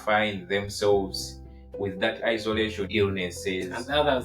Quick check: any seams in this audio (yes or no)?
yes